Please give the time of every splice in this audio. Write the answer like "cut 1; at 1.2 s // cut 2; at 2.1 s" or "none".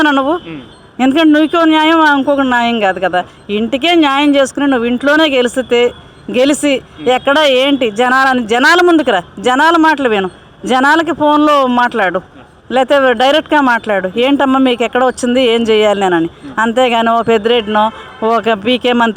none

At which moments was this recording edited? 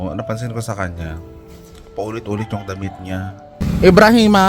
cut 1; at 3.6 s

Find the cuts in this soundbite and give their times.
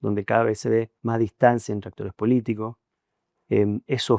cut 1; at 1.0 s

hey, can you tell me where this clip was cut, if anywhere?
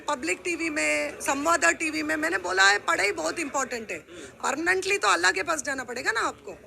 cut 1; at 4.3 s

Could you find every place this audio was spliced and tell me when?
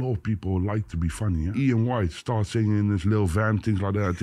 cut 1; at 1.5 s

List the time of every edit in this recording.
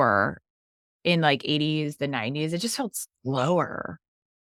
none

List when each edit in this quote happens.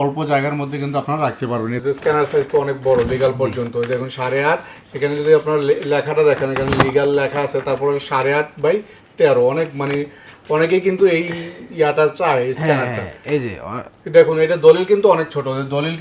cut 1; at 1.8 s

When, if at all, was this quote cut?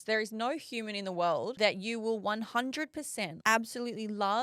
cut 1; at 1.5 s

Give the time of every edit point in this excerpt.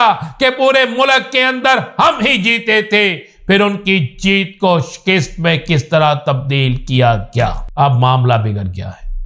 cut 1; at 7.6 s

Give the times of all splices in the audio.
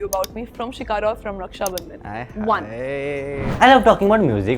cut 1; at 3.4 s

